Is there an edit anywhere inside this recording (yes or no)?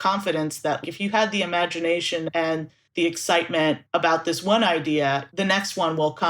yes